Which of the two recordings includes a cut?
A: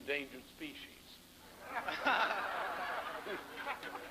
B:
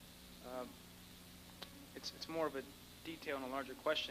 B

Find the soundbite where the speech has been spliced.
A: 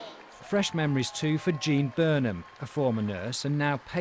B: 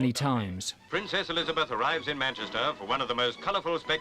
B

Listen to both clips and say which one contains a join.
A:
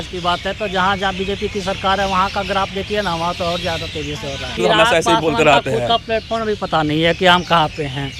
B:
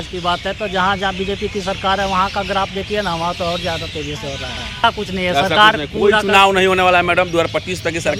A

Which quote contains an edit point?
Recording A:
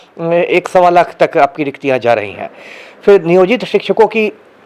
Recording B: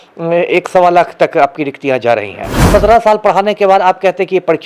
B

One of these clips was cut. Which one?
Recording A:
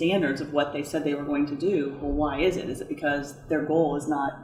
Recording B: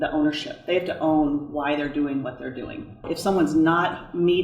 B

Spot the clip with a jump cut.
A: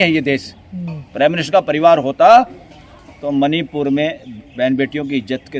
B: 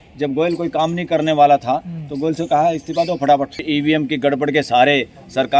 B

